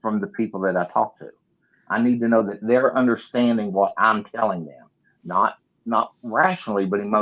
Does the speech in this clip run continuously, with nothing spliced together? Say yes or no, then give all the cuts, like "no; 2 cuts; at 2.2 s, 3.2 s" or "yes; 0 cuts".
yes; 0 cuts